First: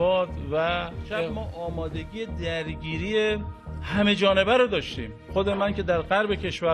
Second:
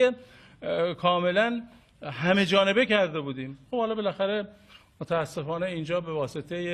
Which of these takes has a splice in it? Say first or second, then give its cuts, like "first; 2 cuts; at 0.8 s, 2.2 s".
first; 1 cut; at 1.3 s